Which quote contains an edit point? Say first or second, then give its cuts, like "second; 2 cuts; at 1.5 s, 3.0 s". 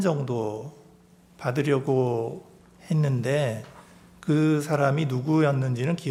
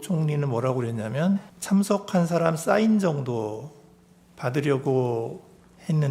second; 1 cut; at 1.5 s